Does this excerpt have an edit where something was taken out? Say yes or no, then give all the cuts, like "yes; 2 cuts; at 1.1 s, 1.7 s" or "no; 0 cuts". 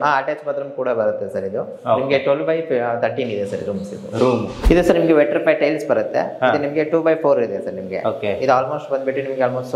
yes; 1 cut; at 4.5 s